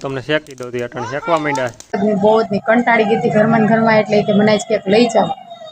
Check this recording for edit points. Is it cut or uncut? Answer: cut